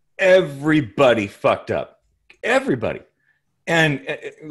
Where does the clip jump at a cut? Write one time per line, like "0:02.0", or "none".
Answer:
none